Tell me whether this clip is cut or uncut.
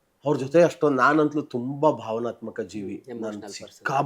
uncut